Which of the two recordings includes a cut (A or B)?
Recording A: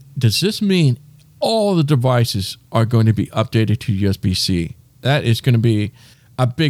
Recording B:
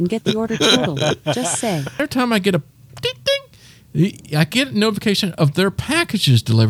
B